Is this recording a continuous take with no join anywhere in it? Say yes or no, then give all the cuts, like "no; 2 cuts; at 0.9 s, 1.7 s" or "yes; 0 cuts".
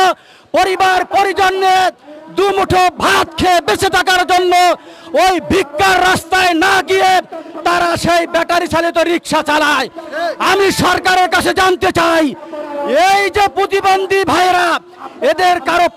yes; 0 cuts